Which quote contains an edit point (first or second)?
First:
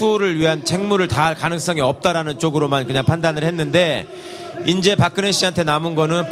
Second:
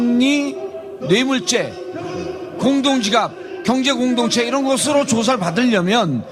first